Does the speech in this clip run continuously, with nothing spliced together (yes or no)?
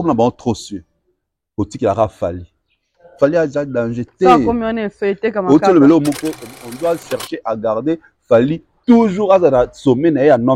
no